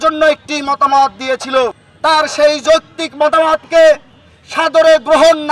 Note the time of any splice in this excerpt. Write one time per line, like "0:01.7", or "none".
0:01.9